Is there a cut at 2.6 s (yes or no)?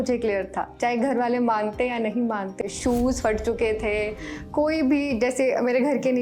yes